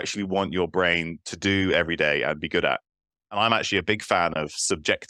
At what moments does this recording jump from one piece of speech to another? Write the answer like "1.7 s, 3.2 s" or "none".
3.3 s